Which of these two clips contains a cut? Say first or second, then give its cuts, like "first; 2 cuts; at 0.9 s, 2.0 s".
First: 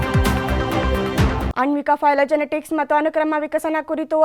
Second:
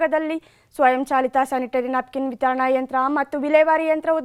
first; 1 cut; at 1.4 s